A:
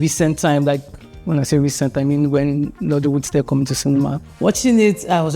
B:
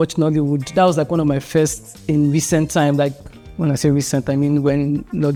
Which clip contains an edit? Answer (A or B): A